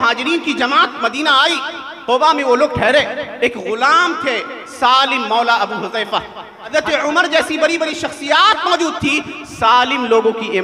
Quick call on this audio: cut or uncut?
cut